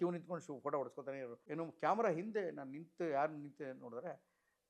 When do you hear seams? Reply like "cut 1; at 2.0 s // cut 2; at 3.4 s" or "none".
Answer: cut 1; at 1.4 s

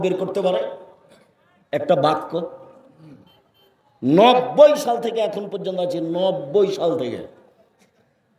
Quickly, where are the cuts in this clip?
none

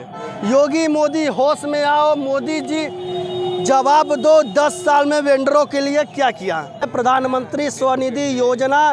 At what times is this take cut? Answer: cut 1; at 6.9 s

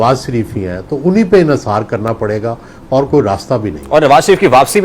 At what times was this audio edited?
none

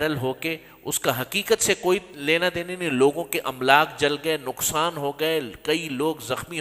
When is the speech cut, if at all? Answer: none

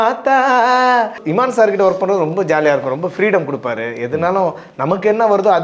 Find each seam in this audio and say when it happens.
cut 1; at 1.2 s

